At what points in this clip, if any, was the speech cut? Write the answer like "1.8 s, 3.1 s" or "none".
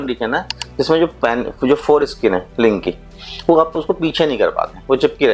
none